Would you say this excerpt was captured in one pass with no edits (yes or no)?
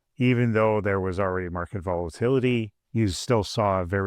no